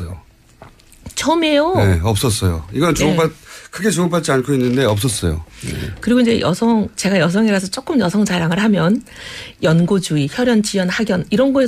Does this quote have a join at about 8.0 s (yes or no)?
no